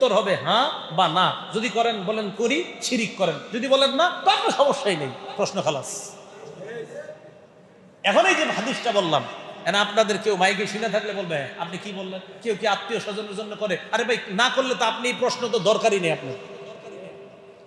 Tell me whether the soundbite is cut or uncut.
uncut